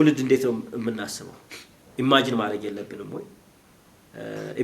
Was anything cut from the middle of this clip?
no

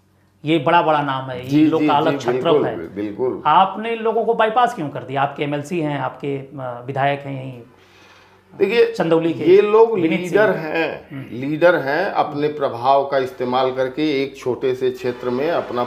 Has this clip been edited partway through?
no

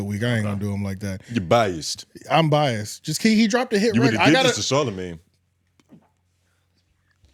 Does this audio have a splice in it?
no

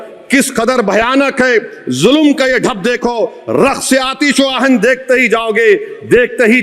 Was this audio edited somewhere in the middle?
no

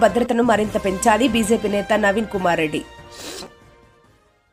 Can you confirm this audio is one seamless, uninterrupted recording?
yes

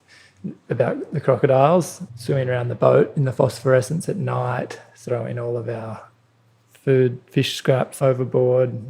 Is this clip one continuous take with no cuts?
no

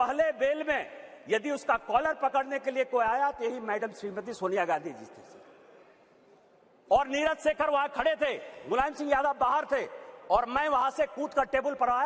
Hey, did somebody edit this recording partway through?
no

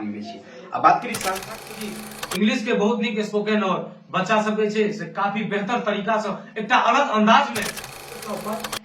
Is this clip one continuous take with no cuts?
no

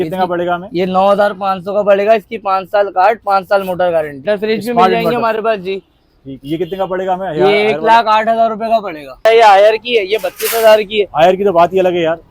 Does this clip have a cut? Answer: yes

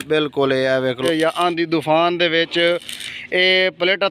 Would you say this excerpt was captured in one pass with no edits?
no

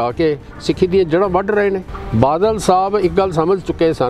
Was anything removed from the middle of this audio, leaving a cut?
yes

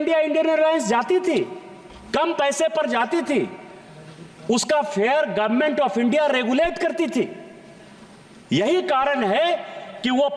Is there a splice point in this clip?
no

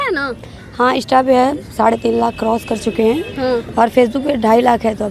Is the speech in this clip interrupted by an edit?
no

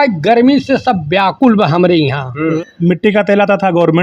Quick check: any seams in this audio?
yes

